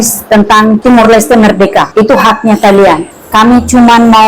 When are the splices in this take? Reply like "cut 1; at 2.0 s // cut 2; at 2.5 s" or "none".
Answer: cut 1; at 0.8 s // cut 2; at 1.9 s // cut 3; at 3.1 s